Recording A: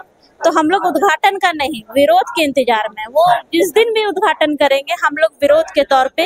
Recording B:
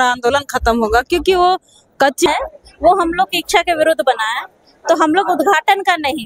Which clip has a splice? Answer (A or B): B